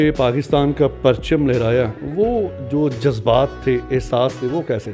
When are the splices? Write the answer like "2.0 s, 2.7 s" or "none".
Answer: none

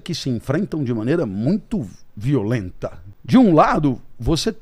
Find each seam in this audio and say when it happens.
3.1 s

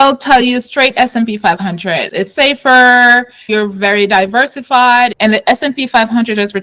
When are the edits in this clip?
2.1 s, 3.5 s, 5.1 s

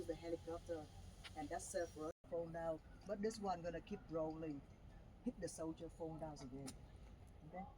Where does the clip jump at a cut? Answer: 2.2 s

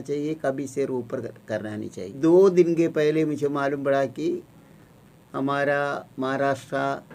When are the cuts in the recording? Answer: 2.1 s

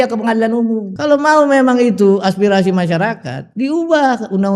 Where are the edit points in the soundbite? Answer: 0.9 s

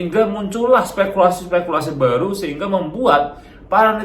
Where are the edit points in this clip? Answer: none

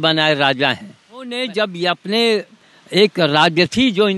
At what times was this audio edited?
1.3 s

